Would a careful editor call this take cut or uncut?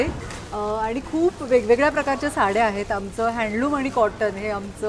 uncut